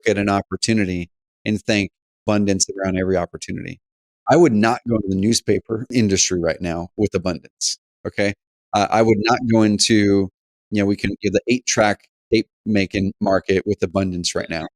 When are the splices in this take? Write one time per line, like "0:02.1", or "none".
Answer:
0:04.1
0:05.9